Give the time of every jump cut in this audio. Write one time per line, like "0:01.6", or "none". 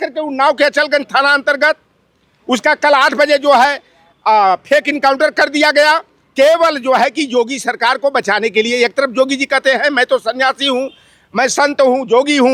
none